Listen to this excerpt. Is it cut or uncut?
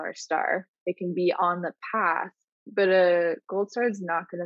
uncut